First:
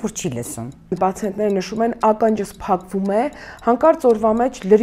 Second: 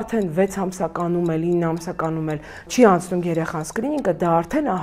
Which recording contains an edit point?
first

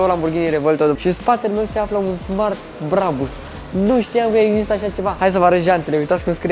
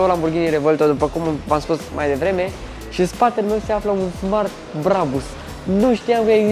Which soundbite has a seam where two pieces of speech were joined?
first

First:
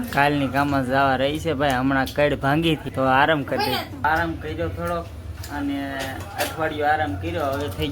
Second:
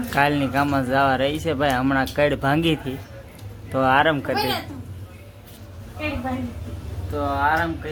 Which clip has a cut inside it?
first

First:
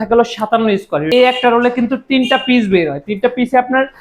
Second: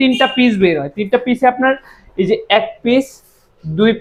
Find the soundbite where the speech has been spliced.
first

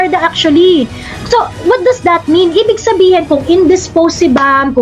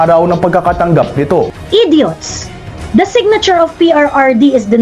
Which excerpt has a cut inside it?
second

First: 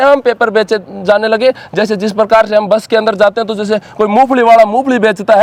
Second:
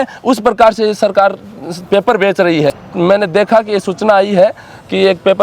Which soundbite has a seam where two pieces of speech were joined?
second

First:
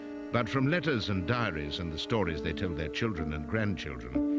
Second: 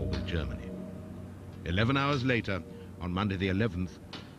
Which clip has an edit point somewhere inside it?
first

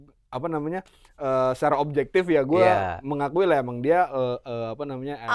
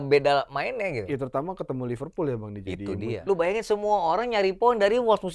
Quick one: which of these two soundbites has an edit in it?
second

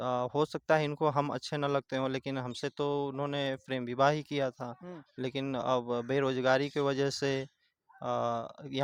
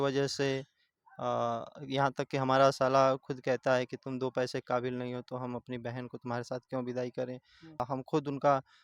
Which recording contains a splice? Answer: second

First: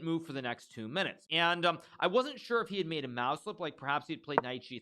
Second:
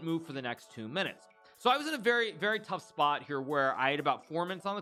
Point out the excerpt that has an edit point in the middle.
first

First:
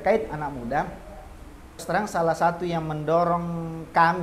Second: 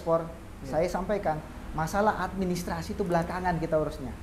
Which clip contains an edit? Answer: first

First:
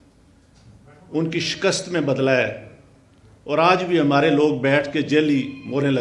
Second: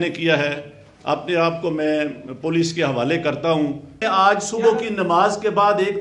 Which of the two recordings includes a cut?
second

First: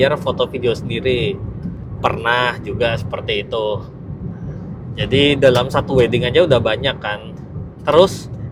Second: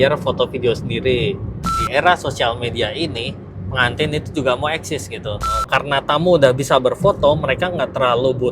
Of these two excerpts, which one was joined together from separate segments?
second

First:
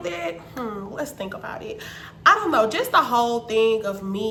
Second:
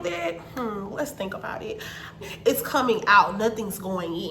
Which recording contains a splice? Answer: second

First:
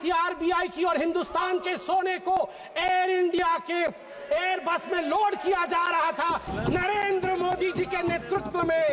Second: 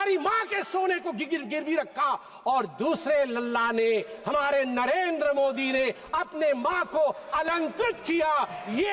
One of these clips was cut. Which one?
first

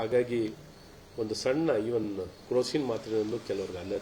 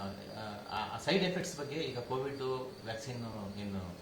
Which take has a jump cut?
second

